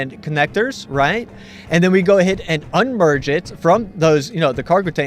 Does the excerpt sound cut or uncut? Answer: cut